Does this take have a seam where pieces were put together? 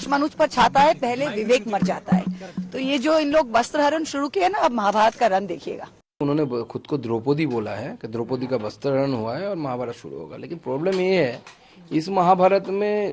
yes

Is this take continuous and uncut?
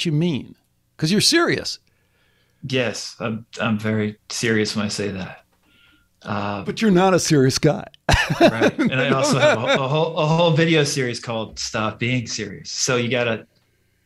yes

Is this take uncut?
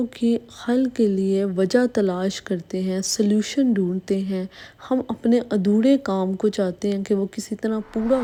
yes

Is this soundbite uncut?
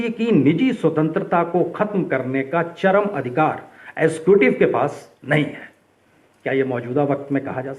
yes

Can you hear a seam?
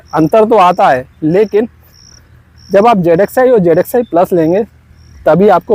no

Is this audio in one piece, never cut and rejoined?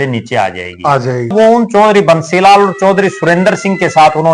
no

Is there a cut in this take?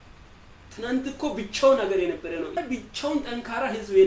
yes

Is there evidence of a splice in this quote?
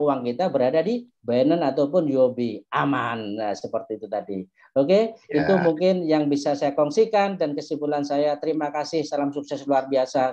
no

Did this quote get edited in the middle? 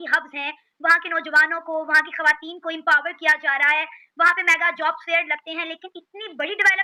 no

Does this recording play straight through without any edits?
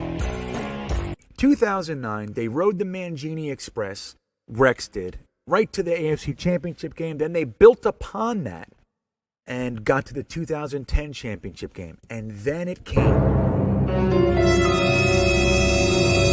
yes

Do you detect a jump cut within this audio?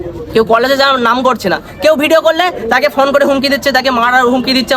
no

